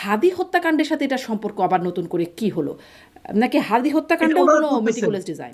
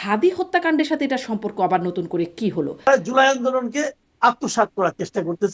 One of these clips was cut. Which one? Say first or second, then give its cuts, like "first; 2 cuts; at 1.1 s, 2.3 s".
second; 1 cut; at 2.9 s